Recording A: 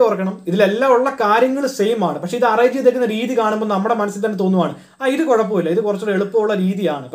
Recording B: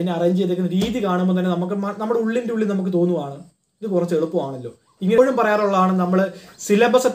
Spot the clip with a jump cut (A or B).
B